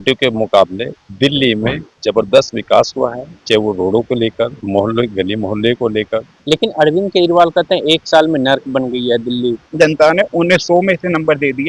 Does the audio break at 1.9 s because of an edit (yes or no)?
yes